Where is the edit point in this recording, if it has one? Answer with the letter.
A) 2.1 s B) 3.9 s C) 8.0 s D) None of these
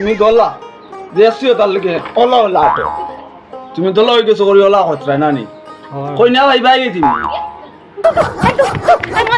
C